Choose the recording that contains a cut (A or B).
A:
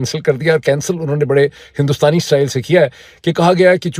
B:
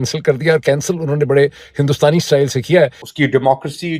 B